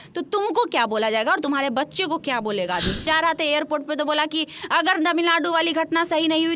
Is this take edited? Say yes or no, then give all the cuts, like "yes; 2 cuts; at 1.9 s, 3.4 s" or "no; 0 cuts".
yes; 1 cut; at 3.0 s